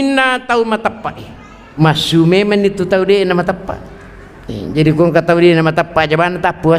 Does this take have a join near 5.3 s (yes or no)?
no